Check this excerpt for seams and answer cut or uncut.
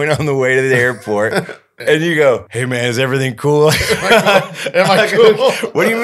cut